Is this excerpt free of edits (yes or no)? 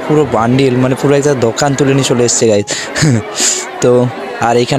yes